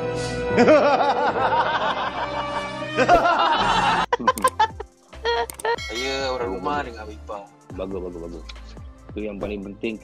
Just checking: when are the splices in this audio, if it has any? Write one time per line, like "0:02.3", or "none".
0:05.8